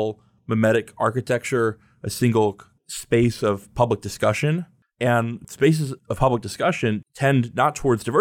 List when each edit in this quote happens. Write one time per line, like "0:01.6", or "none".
0:04.8
0:05.6